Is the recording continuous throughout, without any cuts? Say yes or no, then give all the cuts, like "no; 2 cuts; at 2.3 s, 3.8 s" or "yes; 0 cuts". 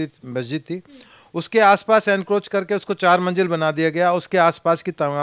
yes; 0 cuts